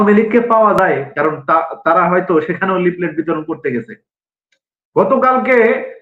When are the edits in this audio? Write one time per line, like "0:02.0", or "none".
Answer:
0:01.1